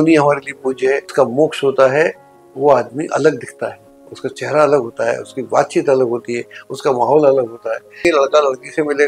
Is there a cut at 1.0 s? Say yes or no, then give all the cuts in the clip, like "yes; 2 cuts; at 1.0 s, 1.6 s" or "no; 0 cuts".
yes; 2 cuts; at 1.0 s, 8.0 s